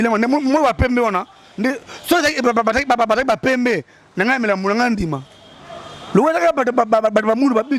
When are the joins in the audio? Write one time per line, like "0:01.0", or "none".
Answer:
none